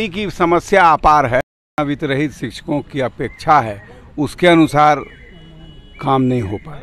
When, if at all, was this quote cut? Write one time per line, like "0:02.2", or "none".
0:01.8